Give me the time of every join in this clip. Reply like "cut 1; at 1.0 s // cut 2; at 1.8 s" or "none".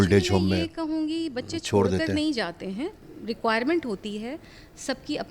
cut 1; at 3.0 s

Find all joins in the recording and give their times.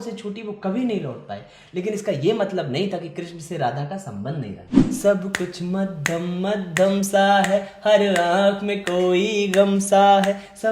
cut 1; at 4.8 s

